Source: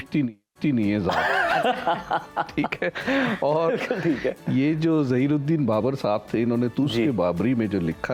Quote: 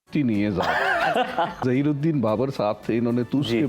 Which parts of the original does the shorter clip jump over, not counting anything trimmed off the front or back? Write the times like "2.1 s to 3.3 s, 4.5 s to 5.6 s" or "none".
2.1 s to 5.1 s

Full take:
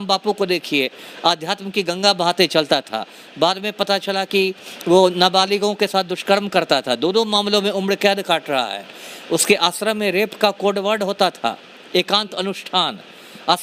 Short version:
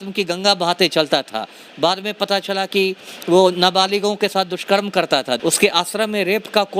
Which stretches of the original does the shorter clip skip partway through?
7.0 s to 9.3 s

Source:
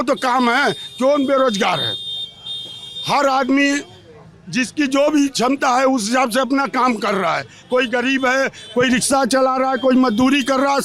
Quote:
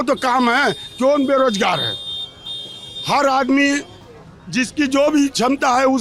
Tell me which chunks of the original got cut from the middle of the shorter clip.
none

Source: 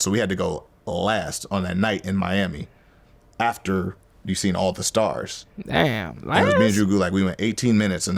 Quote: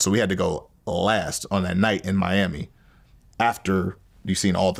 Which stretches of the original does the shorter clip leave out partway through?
none

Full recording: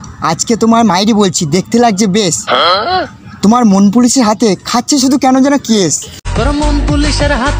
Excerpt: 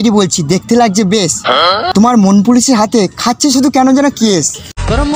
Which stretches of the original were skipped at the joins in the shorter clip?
2.9 s to 3.3 s

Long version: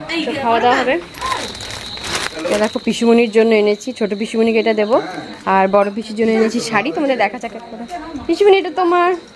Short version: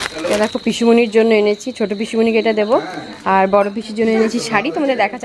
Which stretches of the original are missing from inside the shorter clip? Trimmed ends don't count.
none

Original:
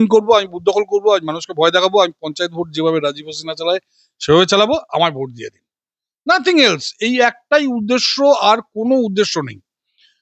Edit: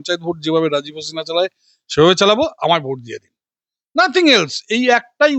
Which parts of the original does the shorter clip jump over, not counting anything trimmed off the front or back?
none

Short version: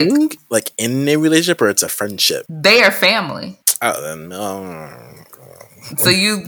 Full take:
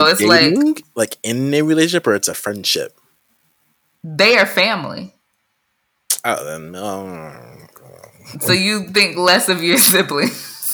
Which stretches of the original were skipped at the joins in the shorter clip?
2.9 s to 4.0 s, 5.2 s to 6.1 s

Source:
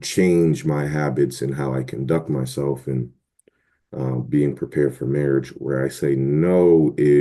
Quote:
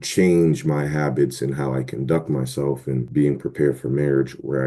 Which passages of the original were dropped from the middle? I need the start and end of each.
3.1 s to 4.3 s

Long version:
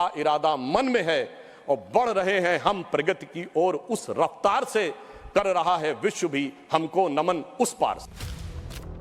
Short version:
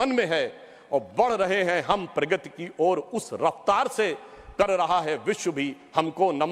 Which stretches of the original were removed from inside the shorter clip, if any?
none

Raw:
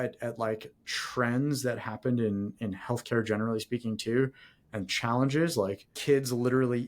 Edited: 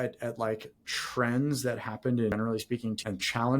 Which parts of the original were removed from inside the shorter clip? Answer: 2.6 s to 4.3 s

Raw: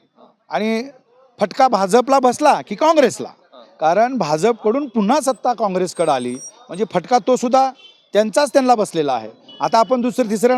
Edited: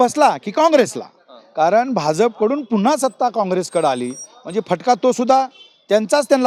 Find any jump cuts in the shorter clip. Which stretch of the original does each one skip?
none

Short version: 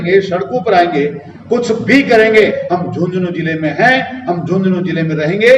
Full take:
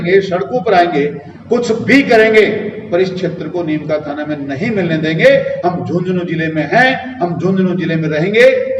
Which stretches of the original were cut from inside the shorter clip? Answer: 2.5 s to 5.4 s

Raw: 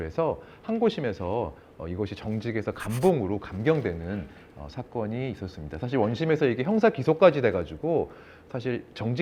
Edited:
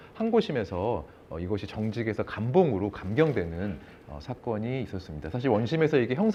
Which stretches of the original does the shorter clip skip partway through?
none

